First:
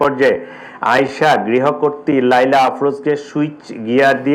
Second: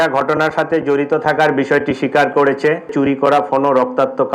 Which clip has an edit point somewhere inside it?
second; 1 cut; at 2.9 s

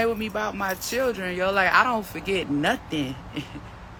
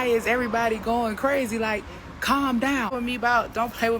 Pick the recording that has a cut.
second; 1 cut; at 2.9 s

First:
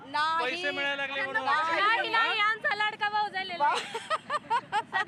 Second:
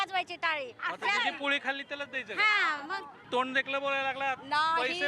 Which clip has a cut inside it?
second; 1 cut; at 3.2 s

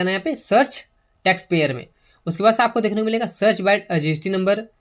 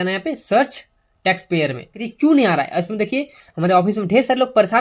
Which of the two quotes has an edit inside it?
second; 1 cut; at 2.0 s

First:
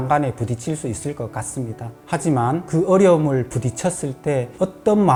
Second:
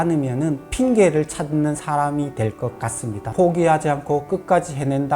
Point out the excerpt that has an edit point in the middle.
second; 1 cut; at 3.3 s

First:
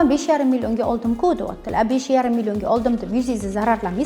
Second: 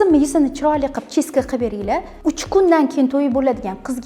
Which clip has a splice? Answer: second; 1 cut; at 2.1 s

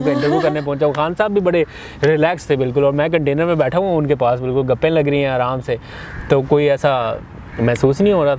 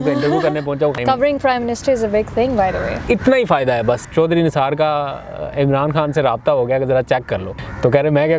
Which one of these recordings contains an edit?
second; 3 cuts; at 1.0 s, 4.0 s, 7.5 s

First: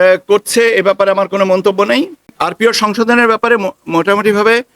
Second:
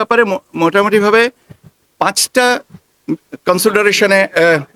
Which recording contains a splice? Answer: first; 1 cut; at 2.4 s

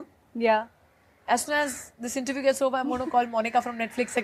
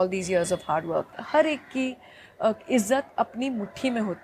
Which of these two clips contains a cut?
second; 1 cut; at 1.2 s

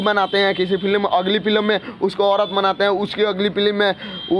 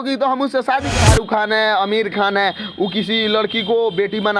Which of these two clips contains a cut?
second; 1 cut; at 0.9 s

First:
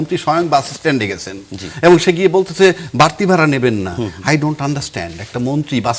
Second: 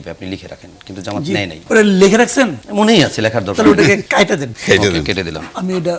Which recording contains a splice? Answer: second; 3 cuts; at 1.6 s, 2.6 s, 4.3 s

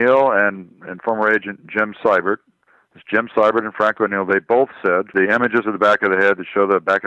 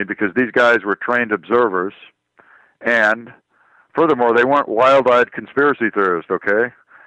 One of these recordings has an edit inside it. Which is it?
first; 1 cut; at 5.1 s

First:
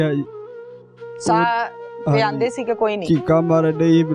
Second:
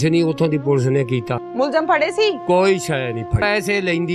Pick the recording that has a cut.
second; 2 cuts; at 1.4 s, 3.4 s

